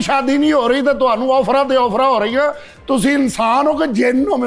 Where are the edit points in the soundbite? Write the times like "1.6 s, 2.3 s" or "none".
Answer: none